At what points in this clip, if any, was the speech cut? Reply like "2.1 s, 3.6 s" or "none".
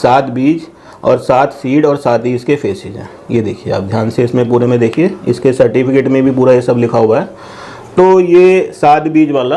none